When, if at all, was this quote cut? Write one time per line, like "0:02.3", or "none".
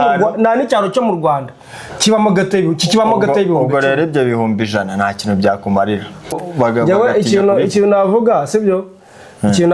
0:06.4